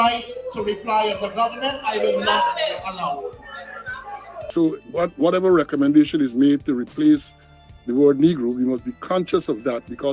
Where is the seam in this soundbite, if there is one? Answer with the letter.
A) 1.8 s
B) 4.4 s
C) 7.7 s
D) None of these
B